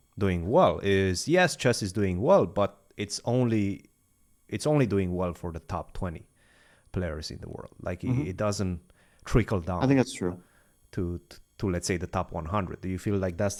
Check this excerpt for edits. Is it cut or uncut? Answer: uncut